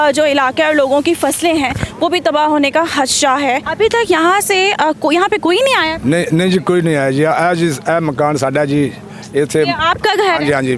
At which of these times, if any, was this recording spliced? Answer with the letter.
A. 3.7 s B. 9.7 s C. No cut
A